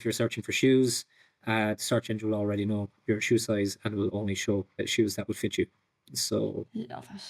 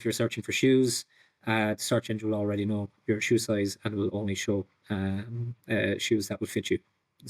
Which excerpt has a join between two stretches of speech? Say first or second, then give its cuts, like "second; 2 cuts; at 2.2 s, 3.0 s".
first; 1 cut; at 4.8 s